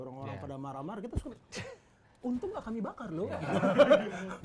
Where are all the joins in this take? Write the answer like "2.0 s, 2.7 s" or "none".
none

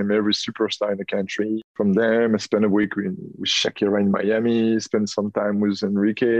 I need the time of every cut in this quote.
1.7 s

